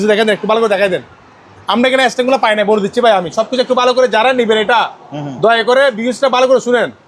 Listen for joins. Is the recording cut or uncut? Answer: uncut